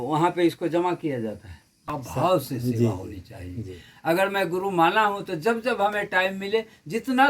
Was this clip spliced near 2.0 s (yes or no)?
yes